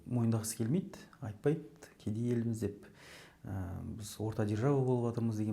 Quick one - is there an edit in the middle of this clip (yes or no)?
no